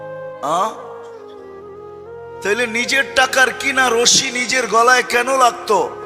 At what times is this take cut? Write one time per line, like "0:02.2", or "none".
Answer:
0:00.9
0:02.4